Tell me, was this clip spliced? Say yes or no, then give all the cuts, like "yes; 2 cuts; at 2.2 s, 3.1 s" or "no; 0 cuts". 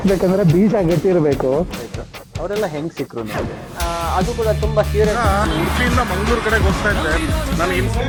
no; 0 cuts